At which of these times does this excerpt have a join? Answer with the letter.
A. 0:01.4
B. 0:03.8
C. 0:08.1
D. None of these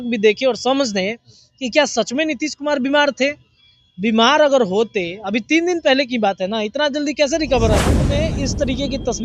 C